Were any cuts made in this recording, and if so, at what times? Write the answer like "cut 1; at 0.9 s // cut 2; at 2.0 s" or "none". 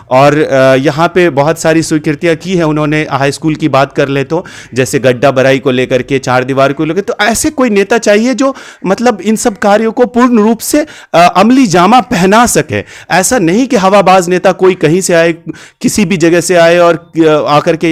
none